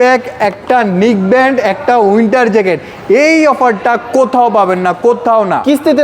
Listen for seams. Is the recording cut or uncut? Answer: uncut